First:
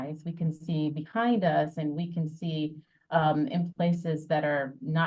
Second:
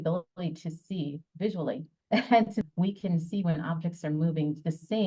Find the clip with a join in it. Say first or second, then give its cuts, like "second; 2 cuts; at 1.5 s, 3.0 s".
second; 1 cut; at 2.7 s